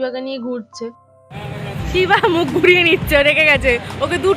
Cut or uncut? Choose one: cut